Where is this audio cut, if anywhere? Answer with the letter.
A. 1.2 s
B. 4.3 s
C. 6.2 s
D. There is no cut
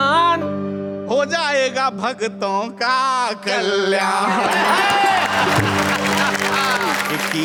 D